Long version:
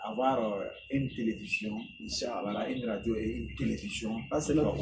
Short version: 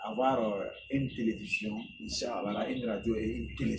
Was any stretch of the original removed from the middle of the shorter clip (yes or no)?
no